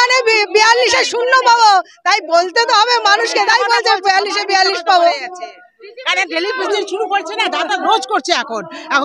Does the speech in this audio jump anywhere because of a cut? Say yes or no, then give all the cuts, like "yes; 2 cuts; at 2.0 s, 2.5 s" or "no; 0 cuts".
no; 0 cuts